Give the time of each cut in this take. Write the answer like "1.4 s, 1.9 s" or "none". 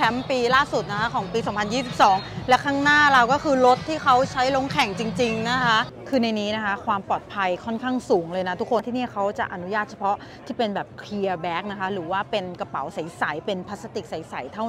6.0 s, 8.8 s